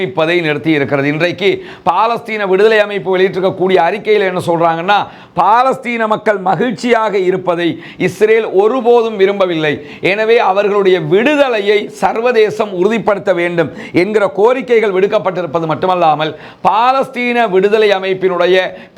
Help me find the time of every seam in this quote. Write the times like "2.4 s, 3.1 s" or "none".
none